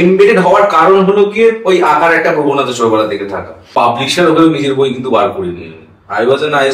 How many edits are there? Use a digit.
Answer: 1